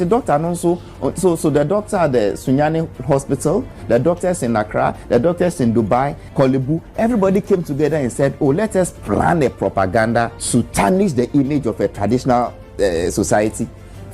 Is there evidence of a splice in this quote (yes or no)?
yes